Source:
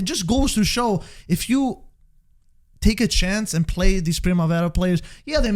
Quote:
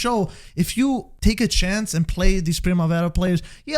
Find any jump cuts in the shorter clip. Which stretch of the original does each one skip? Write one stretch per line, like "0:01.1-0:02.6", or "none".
0:01.8-0:02.7